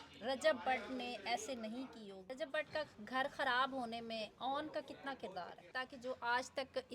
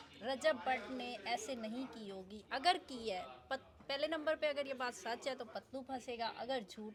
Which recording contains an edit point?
first; 2 cuts; at 2.3 s, 5.8 s

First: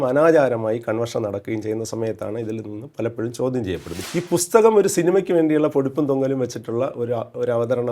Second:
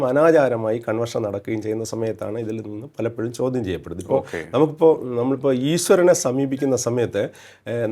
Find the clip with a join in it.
first; 1 cut; at 4.0 s

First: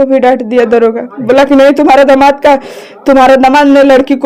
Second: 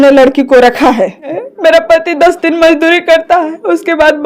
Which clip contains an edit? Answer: second; 1 cut; at 1.5 s

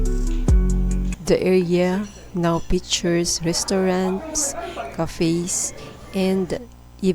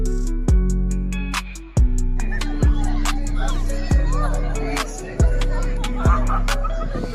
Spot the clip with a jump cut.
first; 1 cut; at 0.9 s

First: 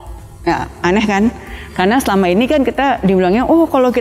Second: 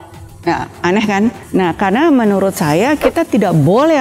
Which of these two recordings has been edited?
second; 1 cut; at 1.4 s

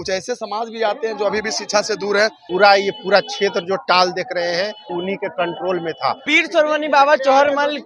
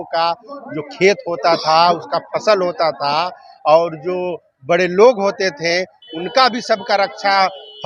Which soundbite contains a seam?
first; 3 cuts; at 2.4 s, 4.9 s, 6.2 s

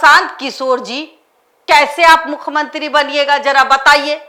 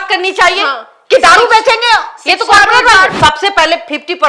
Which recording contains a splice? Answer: second; 1 cut; at 3.1 s

